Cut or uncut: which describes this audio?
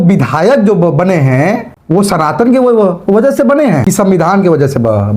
cut